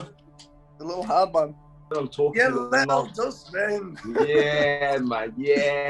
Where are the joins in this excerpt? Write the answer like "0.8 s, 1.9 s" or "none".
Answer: 1.9 s